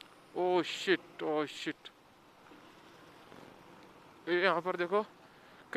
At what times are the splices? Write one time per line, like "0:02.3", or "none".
none